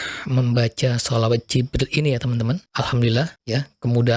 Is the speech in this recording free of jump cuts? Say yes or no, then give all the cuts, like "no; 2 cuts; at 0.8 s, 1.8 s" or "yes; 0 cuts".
no; 2 cuts; at 2.7 s, 3.4 s